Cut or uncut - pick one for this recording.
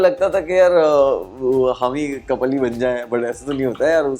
uncut